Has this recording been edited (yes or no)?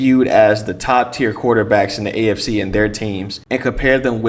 yes